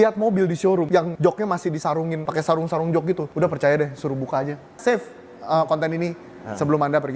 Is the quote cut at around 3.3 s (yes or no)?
yes